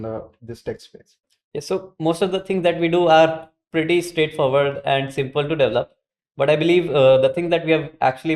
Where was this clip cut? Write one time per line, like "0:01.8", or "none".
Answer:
none